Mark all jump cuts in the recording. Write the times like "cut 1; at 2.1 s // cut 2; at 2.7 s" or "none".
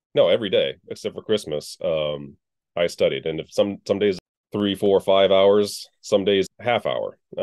cut 1; at 4.2 s // cut 2; at 6.5 s